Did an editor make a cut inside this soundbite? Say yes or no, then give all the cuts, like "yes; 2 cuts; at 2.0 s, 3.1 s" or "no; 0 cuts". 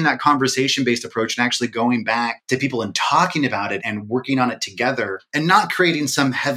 yes; 3 cuts; at 2.4 s, 3.8 s, 5.2 s